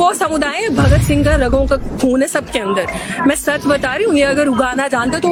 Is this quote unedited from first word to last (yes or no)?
yes